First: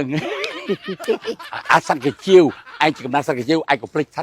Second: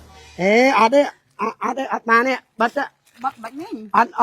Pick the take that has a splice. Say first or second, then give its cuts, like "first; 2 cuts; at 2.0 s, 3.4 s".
first; 1 cut; at 1.5 s